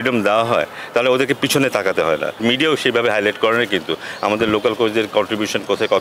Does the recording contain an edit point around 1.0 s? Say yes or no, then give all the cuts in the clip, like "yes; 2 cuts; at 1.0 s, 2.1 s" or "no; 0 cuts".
no; 1 cut; at 2.4 s